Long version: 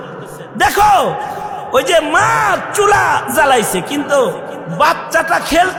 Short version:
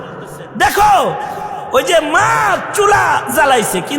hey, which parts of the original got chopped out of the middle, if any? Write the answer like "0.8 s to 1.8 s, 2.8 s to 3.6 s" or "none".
none